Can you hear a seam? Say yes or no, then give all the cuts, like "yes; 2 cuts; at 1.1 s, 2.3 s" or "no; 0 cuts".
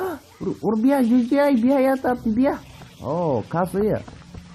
yes; 1 cut; at 3.5 s